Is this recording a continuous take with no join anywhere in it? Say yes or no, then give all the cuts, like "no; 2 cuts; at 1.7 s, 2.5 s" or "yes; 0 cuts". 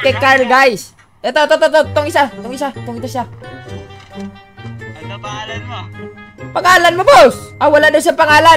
no; 1 cut; at 7.5 s